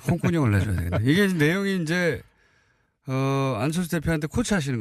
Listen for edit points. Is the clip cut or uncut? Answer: cut